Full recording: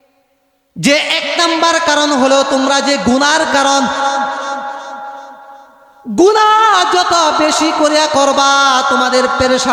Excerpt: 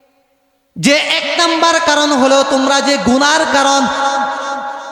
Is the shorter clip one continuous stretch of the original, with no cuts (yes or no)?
yes